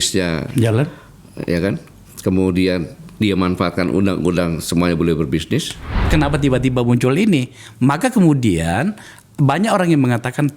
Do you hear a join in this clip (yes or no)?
yes